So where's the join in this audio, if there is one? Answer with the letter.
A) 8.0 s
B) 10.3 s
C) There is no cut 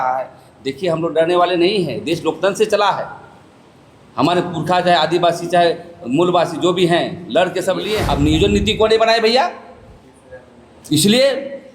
A